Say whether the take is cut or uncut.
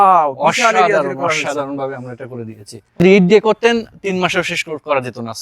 cut